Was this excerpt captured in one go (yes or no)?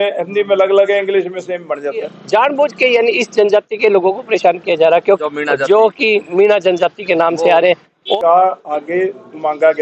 no